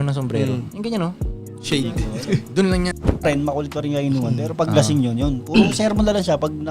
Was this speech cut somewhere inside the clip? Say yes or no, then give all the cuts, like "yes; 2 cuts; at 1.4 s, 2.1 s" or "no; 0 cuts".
yes; 1 cut; at 3.2 s